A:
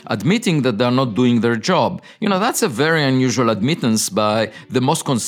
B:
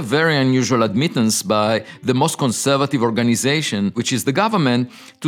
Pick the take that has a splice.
B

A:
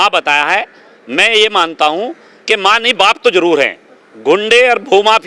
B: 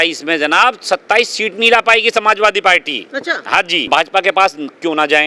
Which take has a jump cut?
B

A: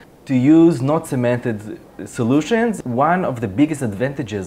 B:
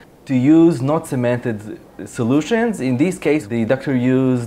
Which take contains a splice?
A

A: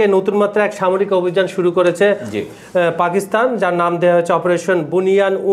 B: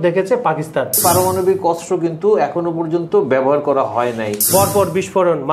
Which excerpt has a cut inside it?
B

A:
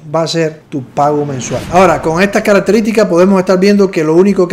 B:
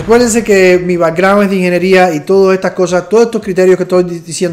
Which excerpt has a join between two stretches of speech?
A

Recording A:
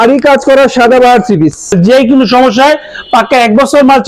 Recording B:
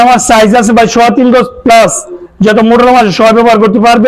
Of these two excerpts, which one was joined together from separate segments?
A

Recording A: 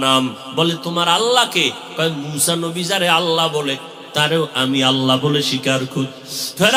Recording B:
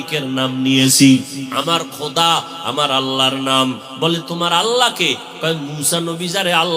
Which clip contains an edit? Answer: B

